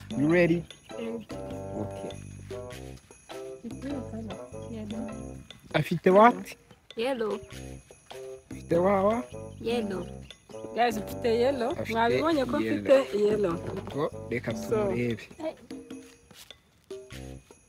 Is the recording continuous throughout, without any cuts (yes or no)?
yes